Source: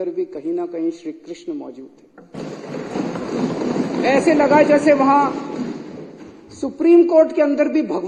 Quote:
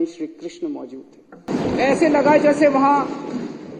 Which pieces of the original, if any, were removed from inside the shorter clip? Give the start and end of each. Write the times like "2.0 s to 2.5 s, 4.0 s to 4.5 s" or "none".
2.3 s to 3.7 s